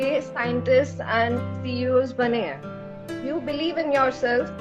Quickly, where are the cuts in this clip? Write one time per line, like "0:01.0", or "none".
0:03.0